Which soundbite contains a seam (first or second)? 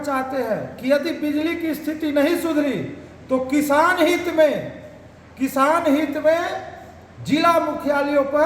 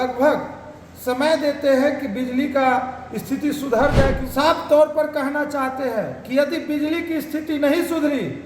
second